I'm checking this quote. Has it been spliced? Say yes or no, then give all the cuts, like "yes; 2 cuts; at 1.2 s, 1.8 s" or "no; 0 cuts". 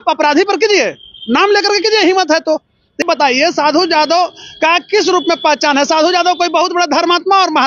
yes; 1 cut; at 3.0 s